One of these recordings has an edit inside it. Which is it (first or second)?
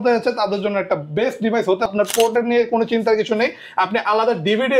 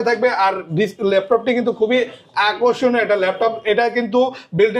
first